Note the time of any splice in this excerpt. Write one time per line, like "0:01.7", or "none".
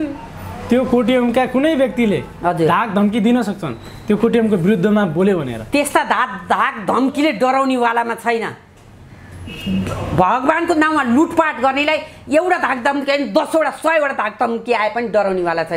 none